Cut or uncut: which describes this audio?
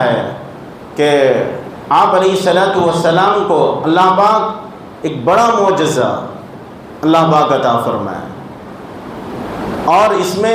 uncut